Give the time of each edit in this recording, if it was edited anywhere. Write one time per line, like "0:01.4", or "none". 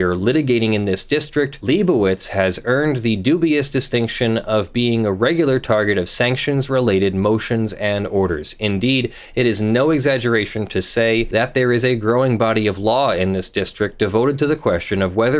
0:01.6
0:11.3